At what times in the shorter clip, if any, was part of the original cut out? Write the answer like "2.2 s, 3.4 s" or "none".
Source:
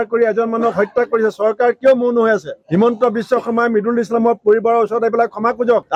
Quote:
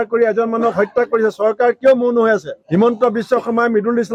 none